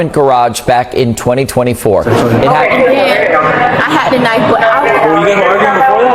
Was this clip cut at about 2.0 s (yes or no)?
yes